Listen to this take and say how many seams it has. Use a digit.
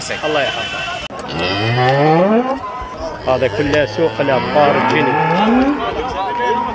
1